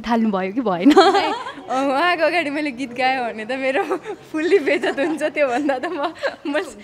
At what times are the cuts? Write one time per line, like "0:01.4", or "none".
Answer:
none